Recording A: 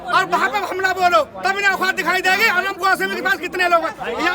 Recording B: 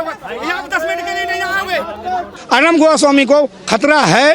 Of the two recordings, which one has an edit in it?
B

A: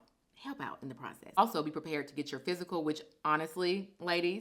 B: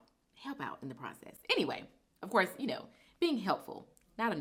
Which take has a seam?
A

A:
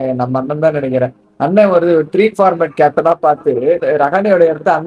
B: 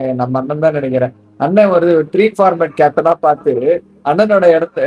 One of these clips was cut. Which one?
A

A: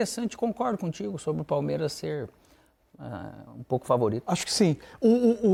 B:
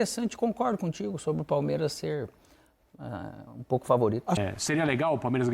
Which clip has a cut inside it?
B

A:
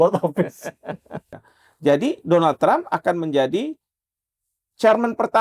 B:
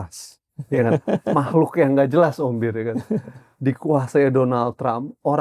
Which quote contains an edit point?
A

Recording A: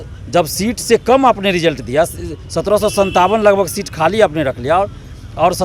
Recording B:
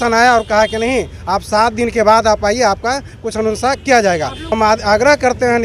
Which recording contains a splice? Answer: B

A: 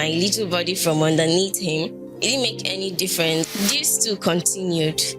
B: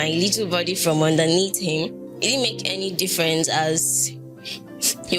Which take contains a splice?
A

